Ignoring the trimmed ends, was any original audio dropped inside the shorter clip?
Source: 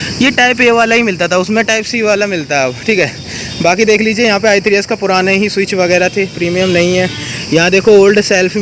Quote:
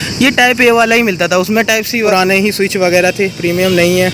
yes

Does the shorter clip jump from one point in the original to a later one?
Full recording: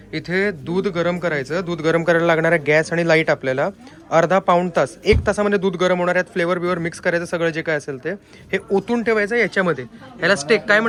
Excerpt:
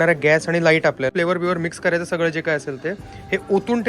yes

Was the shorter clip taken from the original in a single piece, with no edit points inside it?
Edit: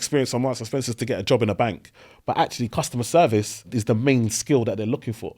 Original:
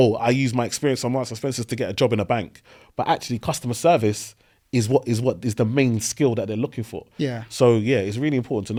no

